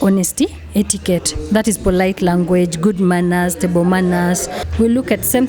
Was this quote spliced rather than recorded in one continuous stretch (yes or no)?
yes